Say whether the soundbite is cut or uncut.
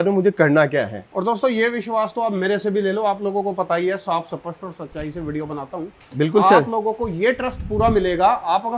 uncut